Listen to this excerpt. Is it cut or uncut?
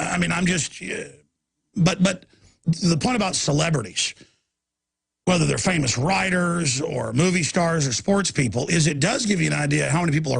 cut